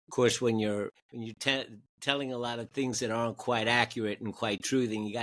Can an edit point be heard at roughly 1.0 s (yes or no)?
yes